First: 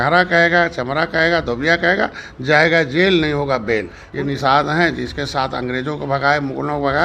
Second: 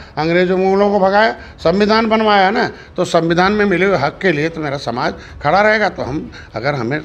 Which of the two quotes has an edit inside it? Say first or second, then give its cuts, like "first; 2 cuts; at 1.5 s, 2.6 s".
first; 1 cut; at 4.0 s